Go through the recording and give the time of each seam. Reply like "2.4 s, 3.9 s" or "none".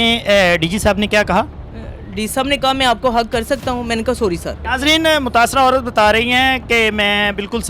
4.6 s